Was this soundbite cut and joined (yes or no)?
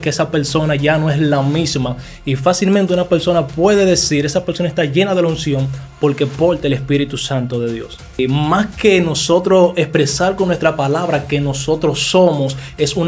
yes